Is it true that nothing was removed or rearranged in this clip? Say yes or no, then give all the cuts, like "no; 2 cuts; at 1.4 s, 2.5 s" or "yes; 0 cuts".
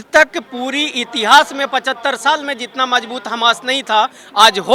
yes; 0 cuts